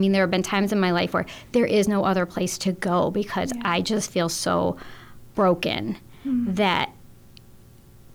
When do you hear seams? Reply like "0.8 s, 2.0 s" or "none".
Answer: none